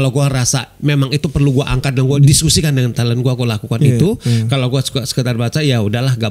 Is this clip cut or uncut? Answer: cut